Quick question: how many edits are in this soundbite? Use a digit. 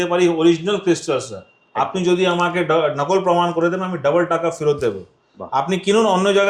0